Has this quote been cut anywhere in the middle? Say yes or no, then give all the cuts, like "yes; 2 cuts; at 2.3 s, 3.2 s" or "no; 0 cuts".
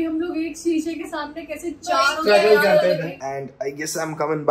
yes; 1 cut; at 3.2 s